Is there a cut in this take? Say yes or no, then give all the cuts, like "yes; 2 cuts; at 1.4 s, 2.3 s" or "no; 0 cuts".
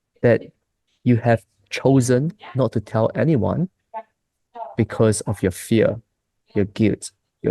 no; 0 cuts